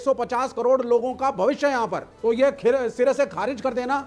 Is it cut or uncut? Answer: cut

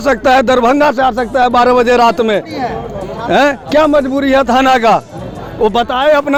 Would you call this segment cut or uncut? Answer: uncut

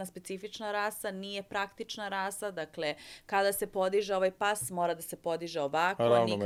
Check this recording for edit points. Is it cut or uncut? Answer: uncut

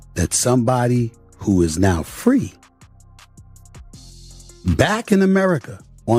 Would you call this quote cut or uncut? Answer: uncut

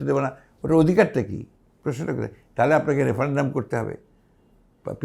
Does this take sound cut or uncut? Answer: uncut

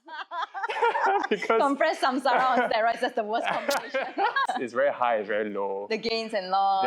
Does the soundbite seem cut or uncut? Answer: cut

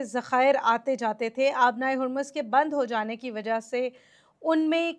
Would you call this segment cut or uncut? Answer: uncut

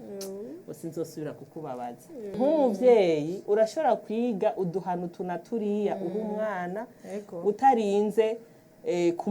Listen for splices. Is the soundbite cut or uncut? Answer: cut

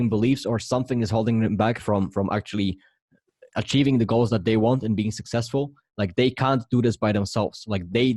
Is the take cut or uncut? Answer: uncut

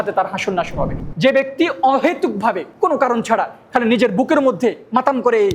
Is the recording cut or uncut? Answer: cut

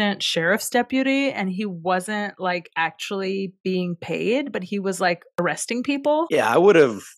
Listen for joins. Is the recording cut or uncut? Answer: uncut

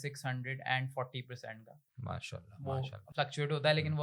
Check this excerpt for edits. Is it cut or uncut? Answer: uncut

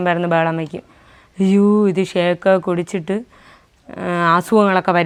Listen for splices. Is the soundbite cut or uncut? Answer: uncut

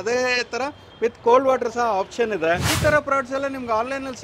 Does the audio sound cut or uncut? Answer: cut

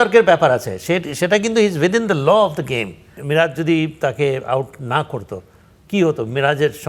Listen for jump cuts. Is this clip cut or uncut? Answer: cut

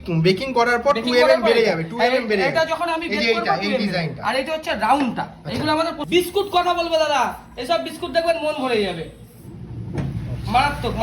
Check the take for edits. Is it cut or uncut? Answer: cut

